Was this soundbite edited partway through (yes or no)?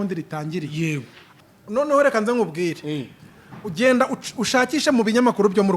yes